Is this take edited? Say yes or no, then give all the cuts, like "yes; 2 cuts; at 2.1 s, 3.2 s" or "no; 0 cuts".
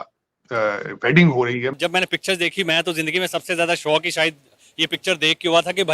yes; 1 cut; at 1.8 s